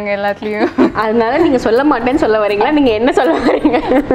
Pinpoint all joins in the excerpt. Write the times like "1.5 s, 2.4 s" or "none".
0.9 s

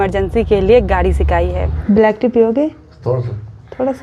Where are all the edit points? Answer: 1.7 s

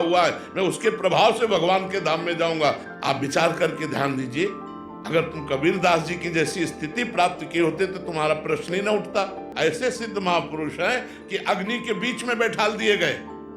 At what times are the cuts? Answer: 9.4 s

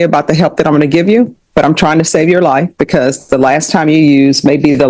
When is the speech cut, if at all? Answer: none

